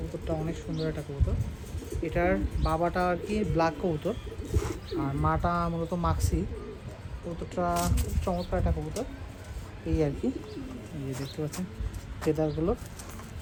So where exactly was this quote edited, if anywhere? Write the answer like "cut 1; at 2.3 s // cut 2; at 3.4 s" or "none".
none